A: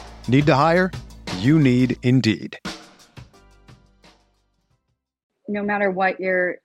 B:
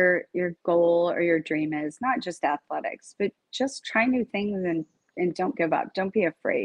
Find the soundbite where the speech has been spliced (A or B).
A